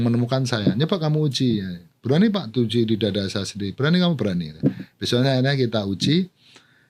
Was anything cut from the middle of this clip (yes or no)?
no